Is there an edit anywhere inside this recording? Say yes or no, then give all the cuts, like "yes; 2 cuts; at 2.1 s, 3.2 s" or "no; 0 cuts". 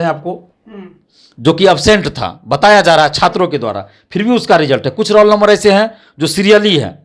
no; 0 cuts